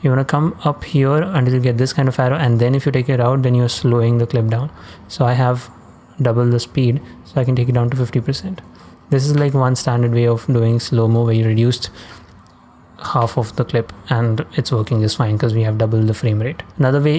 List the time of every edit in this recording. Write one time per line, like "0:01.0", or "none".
none